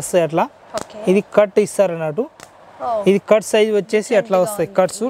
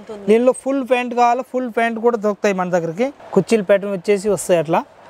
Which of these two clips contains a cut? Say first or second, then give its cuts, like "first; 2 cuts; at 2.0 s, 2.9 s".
second; 1 cut; at 3.2 s